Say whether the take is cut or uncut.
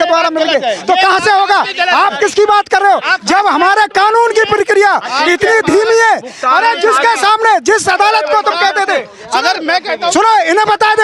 uncut